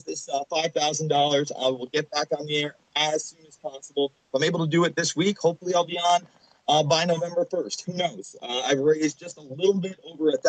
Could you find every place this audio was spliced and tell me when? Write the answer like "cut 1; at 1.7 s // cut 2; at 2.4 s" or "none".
none